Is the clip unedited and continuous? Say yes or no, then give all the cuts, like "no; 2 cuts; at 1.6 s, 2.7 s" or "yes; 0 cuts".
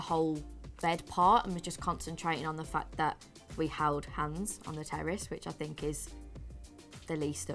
yes; 0 cuts